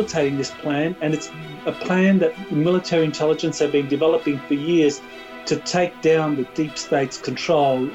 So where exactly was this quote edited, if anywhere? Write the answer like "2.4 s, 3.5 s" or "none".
none